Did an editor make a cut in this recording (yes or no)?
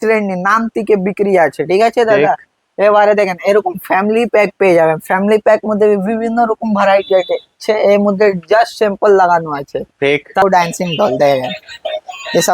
yes